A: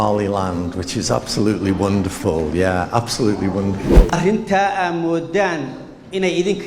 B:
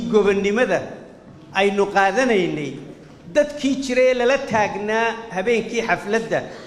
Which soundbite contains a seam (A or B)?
A